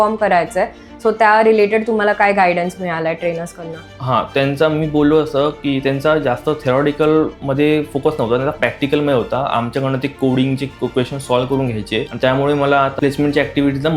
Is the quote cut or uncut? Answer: cut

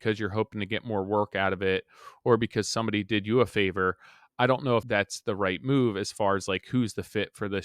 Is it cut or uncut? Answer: cut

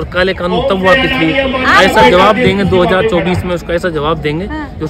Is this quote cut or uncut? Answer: uncut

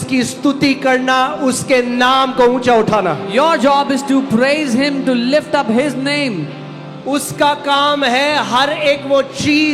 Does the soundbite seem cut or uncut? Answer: uncut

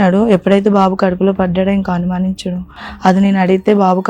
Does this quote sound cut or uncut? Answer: cut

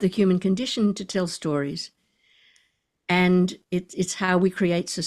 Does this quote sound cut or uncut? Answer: uncut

